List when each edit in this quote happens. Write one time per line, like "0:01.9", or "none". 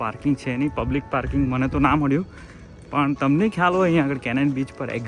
none